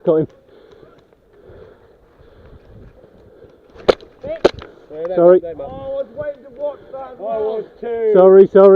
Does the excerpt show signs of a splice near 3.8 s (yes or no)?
yes